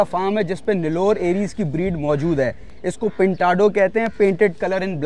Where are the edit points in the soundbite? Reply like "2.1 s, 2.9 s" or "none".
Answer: none